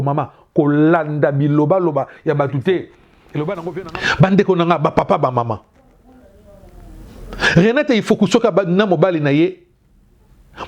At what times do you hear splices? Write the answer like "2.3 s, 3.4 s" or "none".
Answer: 3.7 s

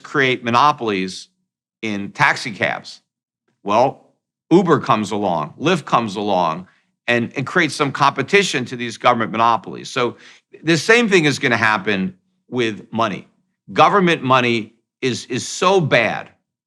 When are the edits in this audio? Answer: none

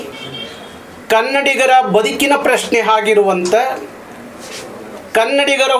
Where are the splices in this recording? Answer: none

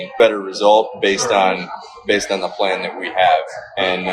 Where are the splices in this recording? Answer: none

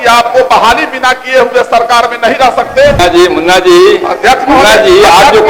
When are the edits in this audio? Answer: 3.0 s

